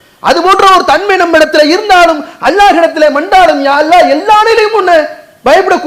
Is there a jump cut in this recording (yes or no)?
no